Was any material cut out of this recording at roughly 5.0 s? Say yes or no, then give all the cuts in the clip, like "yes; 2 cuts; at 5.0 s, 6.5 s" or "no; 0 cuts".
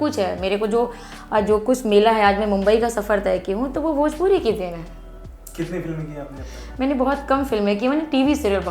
no; 0 cuts